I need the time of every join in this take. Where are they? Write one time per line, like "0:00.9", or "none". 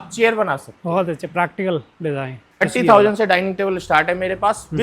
0:02.6